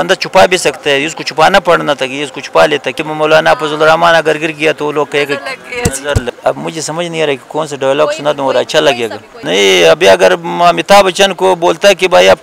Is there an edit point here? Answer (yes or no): yes